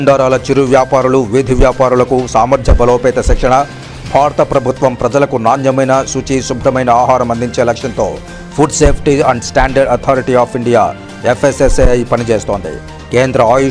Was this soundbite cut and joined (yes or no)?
no